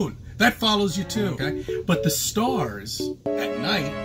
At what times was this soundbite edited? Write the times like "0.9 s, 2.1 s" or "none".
1.4 s